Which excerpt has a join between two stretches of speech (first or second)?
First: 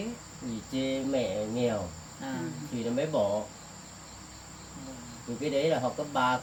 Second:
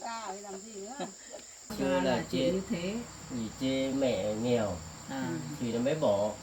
second